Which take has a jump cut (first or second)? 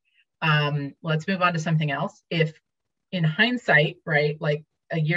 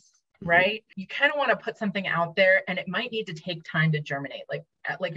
second